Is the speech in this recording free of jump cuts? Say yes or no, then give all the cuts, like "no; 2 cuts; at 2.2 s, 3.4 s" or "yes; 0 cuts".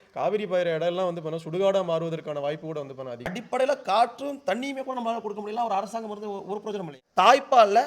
no; 2 cuts; at 3.4 s, 7.0 s